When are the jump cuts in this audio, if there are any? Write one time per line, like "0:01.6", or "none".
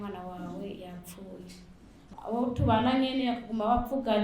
0:02.1

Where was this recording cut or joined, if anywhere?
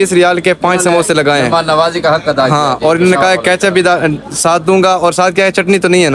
none

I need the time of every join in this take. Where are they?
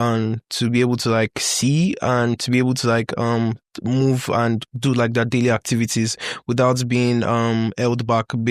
none

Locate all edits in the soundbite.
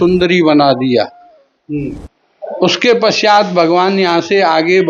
none

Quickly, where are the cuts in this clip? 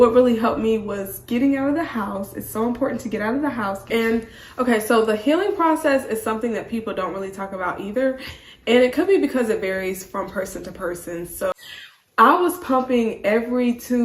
0:03.8
0:11.5

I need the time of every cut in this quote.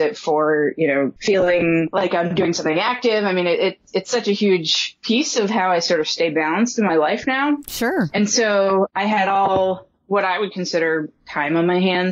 0:01.2
0:01.9

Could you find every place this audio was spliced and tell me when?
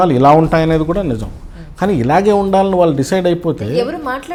none

